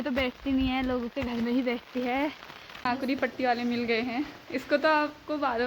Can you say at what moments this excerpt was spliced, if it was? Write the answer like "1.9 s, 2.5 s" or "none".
2.8 s